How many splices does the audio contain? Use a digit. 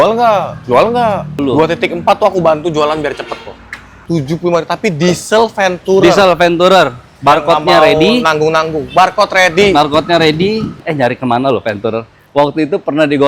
3